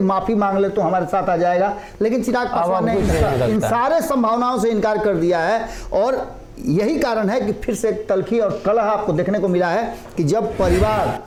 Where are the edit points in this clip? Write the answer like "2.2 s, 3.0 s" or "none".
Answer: none